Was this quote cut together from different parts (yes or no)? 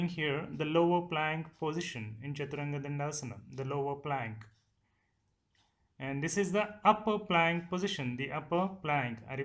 no